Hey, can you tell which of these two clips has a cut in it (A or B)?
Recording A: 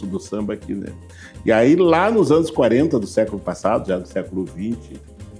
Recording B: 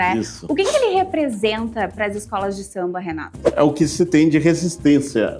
B